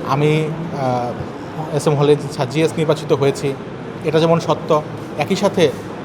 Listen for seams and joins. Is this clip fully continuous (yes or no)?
yes